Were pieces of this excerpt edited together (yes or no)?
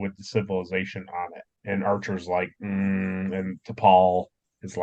yes